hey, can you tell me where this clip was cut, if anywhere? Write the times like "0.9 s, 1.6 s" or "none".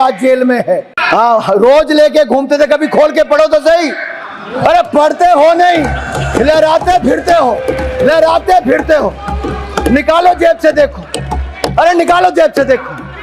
0.9 s